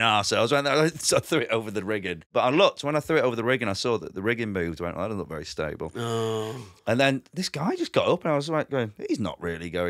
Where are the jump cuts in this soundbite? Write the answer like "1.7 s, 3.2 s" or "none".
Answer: 2.3 s